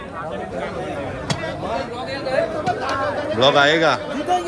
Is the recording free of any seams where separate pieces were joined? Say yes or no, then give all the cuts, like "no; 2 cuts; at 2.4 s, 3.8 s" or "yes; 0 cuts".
yes; 0 cuts